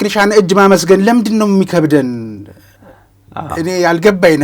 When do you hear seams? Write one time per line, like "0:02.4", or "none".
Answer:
none